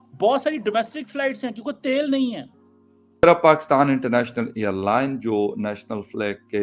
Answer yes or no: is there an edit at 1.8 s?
no